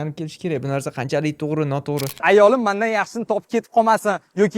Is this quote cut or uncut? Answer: cut